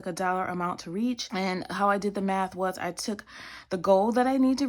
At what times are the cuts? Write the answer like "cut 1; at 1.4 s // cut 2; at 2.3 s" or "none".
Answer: cut 1; at 1.2 s

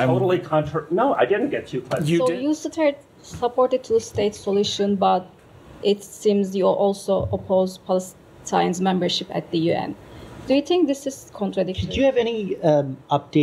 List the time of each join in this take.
cut 1; at 2.2 s // cut 2; at 11.8 s

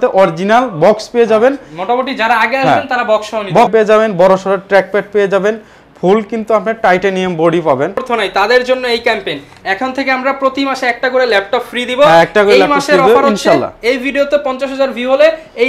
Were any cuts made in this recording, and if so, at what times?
cut 1; at 3.7 s // cut 2; at 8.0 s

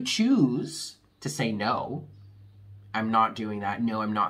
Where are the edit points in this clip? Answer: none

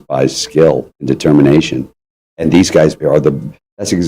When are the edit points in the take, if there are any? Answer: cut 1; at 0.9 s // cut 2; at 3.0 s

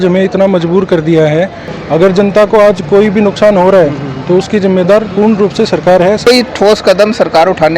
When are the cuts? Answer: cut 1; at 1.7 s // cut 2; at 6.3 s

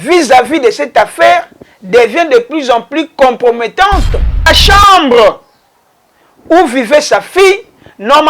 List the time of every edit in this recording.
cut 1; at 4.5 s

